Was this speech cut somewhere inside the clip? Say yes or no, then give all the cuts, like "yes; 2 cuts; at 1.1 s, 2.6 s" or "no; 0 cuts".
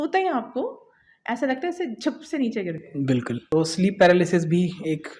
yes; 1 cut; at 3.4 s